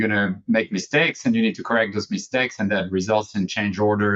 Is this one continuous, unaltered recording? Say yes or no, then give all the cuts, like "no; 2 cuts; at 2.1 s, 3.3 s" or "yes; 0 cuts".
yes; 0 cuts